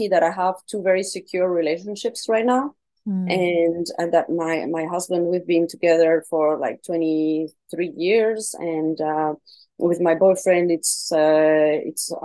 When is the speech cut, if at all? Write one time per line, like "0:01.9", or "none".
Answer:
none